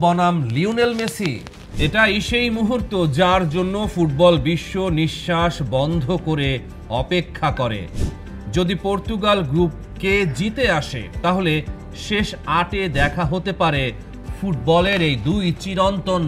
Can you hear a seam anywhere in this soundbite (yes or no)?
no